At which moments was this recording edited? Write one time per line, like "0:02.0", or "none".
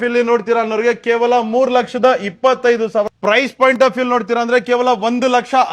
0:03.1